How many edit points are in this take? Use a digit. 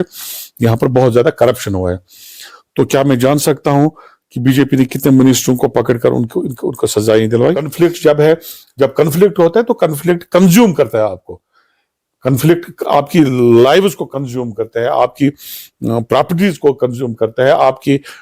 1